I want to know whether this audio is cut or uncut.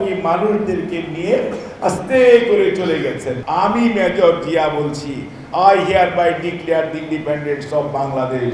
uncut